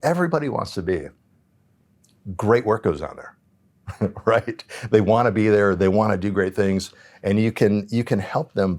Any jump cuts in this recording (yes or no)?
no